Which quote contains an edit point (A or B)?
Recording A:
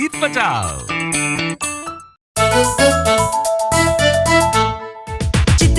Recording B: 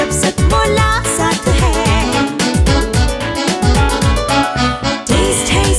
A